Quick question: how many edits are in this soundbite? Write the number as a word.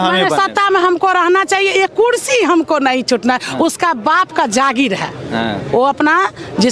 zero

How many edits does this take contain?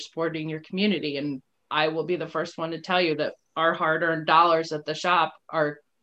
one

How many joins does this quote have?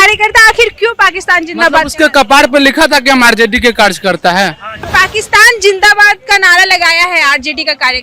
one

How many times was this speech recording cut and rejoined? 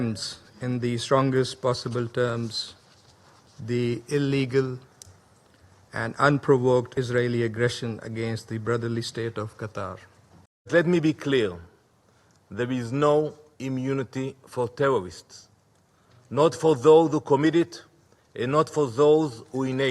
one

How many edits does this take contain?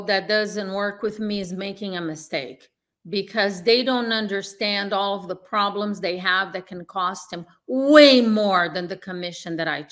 zero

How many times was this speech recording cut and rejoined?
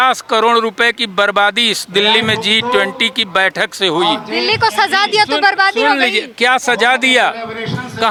zero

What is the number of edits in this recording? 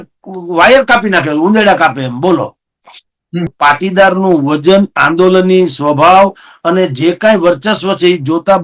one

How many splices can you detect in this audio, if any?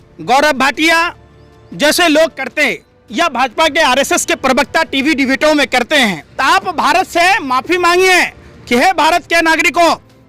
one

